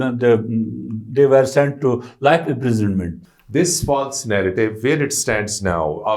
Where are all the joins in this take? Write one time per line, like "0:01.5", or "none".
0:03.2